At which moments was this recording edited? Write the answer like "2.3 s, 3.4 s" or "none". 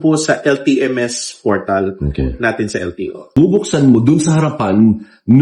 3.3 s